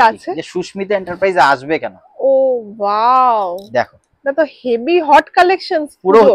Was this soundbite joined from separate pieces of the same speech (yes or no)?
no